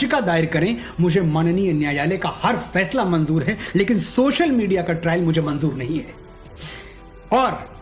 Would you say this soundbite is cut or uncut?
uncut